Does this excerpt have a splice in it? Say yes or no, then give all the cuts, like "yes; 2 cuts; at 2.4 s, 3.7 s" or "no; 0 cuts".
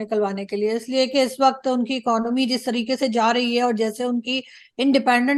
no; 0 cuts